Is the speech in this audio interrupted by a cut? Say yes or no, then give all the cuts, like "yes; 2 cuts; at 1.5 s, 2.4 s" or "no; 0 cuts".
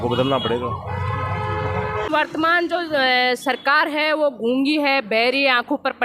yes; 1 cut; at 2.1 s